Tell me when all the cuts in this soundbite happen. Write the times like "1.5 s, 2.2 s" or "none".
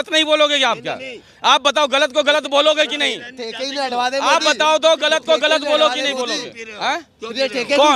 none